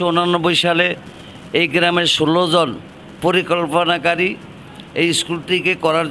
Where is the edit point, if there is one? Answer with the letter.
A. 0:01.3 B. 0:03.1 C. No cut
C